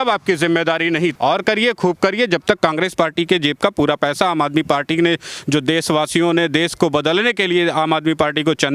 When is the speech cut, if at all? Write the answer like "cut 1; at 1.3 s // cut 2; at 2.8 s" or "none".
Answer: cut 1; at 1.1 s